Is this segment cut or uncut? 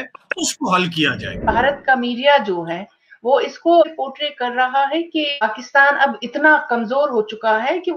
cut